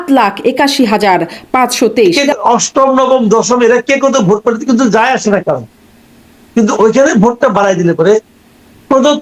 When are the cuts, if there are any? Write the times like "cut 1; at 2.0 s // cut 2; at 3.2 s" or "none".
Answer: cut 1; at 2.2 s